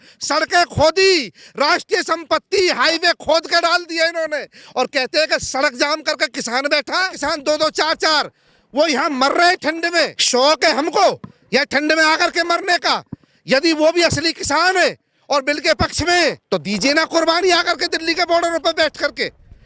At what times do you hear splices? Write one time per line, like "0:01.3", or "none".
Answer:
0:07.1
0:10.2
0:16.4